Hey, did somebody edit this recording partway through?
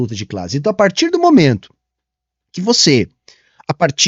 no; 0 cuts

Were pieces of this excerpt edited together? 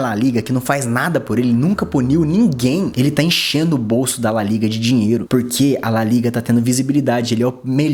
no; 0 cuts

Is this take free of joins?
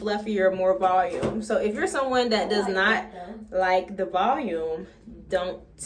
yes; 0 cuts

